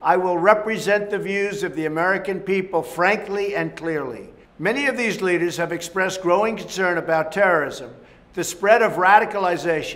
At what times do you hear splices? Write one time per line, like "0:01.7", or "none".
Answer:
none